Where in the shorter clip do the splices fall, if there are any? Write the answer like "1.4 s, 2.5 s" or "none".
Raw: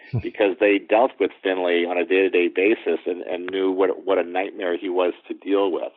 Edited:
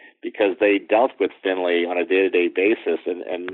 none